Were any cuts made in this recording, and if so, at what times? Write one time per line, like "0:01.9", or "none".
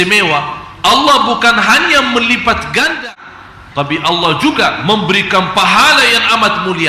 0:03.1

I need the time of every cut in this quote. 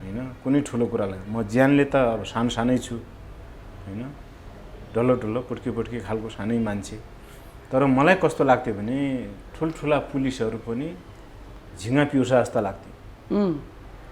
none

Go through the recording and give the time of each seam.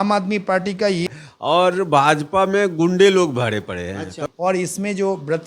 0:01.1
0:04.1

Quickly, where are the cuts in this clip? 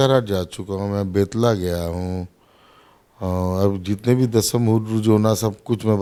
none

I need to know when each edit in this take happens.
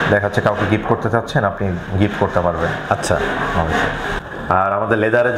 0:04.1

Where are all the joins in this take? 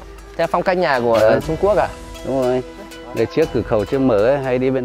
0:02.9

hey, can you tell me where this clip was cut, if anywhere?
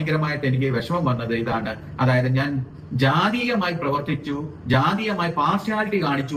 none

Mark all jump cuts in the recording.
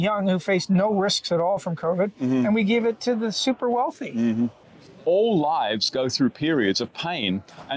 0:04.6

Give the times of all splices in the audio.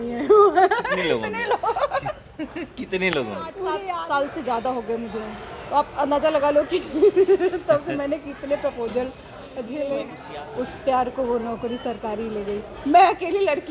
0:03.7
0:10.2

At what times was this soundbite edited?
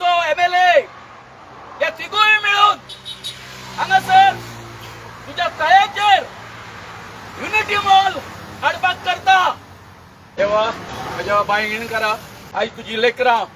0:10.3
0:10.9
0:12.4

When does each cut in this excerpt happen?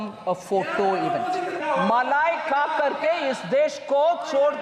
0:01.6

